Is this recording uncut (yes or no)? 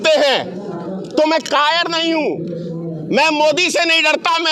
yes